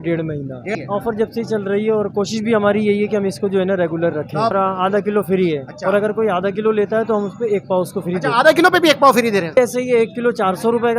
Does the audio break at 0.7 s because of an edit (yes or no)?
yes